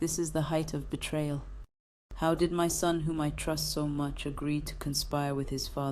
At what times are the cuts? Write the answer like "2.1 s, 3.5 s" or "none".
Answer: none